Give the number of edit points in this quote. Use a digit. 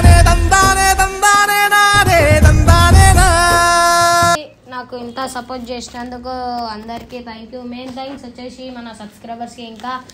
1